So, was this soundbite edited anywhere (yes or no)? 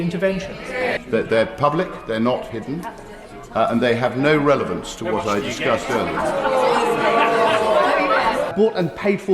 yes